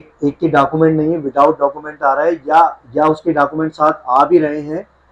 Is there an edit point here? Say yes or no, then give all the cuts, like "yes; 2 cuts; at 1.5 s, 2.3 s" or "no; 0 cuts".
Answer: no; 0 cuts